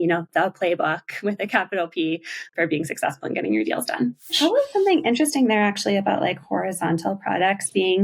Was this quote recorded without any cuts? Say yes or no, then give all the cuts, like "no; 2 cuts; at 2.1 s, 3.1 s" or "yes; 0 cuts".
no; 2 cuts; at 2.5 s, 4.3 s